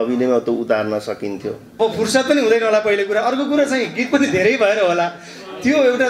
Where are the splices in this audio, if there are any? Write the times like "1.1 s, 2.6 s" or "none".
1.6 s